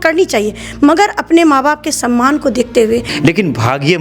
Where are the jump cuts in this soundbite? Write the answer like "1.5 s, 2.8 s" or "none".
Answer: 3.1 s

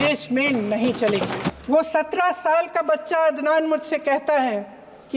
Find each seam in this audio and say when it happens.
1.5 s

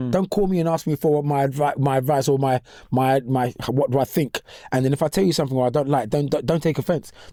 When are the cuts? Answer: none

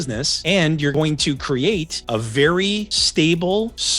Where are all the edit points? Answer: 0.9 s

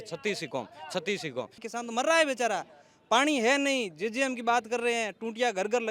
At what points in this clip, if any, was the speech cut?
1.6 s

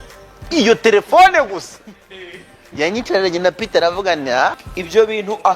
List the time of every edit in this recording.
4.6 s

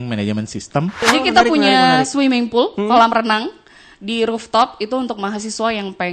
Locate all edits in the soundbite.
1.1 s

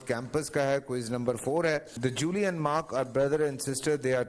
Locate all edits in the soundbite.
1.9 s

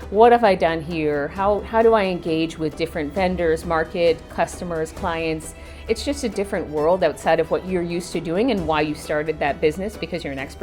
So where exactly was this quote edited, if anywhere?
none

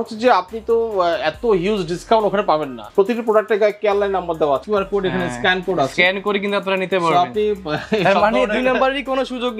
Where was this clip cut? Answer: 2.8 s, 4.6 s

